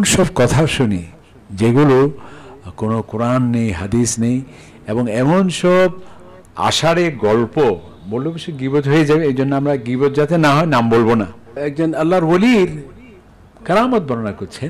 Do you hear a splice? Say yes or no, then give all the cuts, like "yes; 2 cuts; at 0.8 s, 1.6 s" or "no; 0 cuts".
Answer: yes; 1 cut; at 11.6 s